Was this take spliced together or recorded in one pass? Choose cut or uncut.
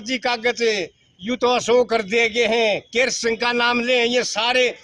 uncut